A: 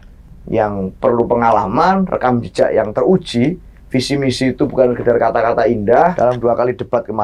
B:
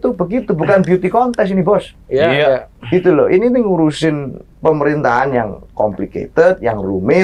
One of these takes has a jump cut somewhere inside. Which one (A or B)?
A